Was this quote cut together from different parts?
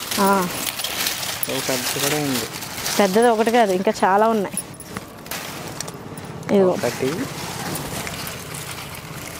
no; 0 cuts

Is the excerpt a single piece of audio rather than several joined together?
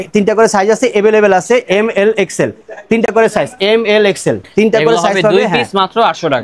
yes; 0 cuts

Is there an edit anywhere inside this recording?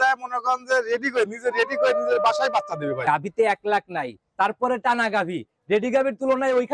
yes; 1 cut; at 3.0 s

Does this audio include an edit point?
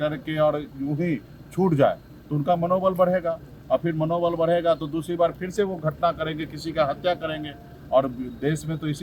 no; 0 cuts

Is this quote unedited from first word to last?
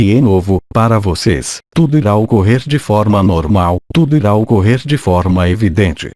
yes; 0 cuts

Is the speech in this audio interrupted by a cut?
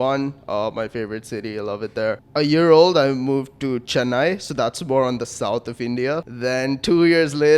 yes; 2 cuts; at 2.2 s, 6.3 s

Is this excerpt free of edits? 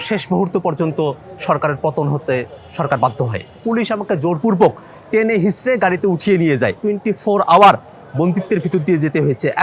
no; 2 cuts; at 3.6 s, 6.8 s

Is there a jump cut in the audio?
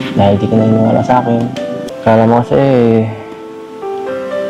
yes; 1 cut; at 1.9 s

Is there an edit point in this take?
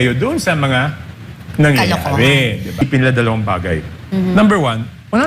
yes; 1 cut; at 2.8 s

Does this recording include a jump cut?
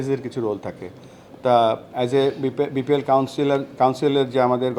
no; 0 cuts

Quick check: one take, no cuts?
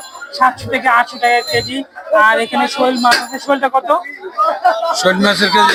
yes; 0 cuts

